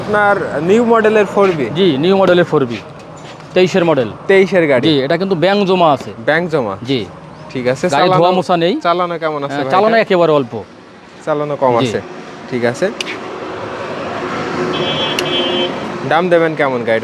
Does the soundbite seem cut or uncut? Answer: uncut